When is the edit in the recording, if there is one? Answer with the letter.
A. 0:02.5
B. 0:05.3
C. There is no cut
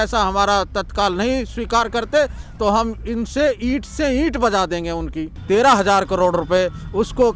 B